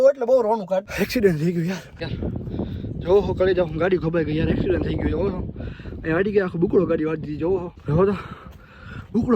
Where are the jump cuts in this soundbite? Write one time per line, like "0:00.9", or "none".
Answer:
0:00.8
0:02.0
0:07.7